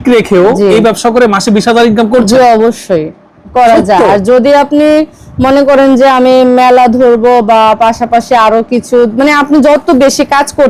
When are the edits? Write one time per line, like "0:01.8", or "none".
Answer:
none